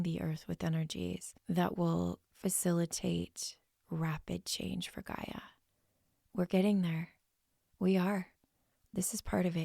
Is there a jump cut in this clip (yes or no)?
yes